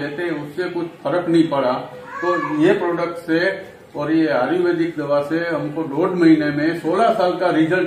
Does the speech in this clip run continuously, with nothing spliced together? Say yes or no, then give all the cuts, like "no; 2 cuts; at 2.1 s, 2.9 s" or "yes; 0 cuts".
yes; 0 cuts